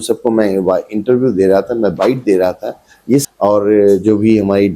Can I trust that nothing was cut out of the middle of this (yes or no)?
no